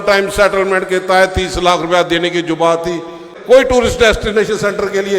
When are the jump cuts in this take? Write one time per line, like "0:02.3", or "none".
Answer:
0:03.3